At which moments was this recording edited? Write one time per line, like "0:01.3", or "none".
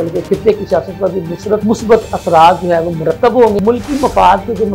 0:01.6
0:03.6